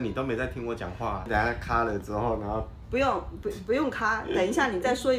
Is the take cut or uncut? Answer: cut